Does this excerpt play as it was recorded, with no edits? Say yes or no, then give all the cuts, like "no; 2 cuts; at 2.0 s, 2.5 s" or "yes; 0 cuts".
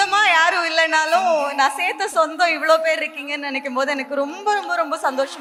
yes; 0 cuts